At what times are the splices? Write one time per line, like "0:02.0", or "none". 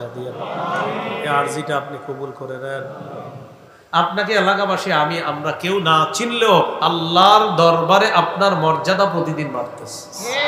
0:03.8